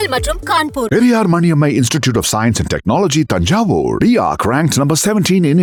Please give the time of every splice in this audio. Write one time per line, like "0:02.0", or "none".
none